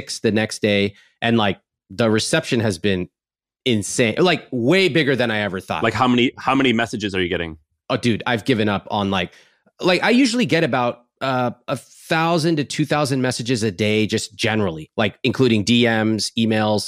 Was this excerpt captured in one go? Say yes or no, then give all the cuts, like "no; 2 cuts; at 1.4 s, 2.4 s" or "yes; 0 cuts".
yes; 0 cuts